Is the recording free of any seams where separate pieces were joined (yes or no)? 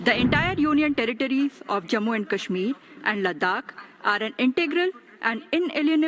yes